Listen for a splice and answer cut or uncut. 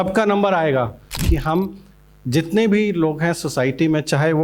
cut